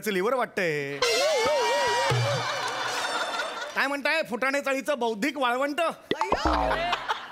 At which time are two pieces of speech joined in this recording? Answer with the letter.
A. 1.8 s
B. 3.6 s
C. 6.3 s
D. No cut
B